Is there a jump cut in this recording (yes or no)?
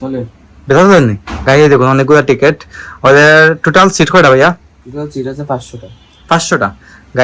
no